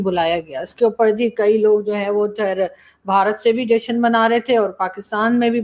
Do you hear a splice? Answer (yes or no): no